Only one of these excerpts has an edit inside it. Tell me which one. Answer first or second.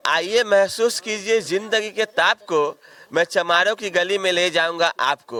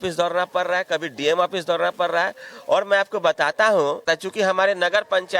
second